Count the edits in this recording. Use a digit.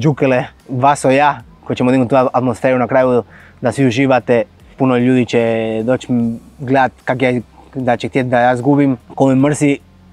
2